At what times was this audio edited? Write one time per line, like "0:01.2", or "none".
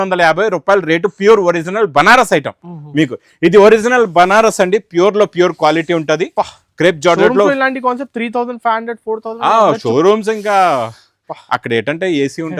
none